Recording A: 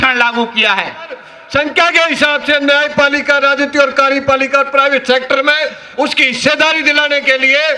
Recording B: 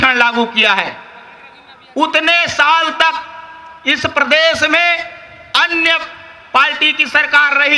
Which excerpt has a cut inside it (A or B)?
A